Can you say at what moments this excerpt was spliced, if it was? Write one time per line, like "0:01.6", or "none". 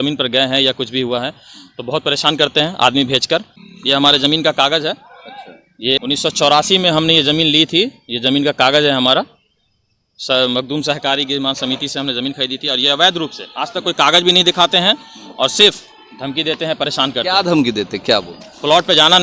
0:03.6
0:06.0